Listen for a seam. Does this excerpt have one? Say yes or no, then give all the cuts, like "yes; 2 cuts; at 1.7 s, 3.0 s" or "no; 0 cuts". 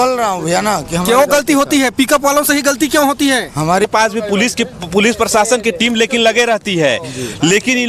yes; 1 cut; at 3.9 s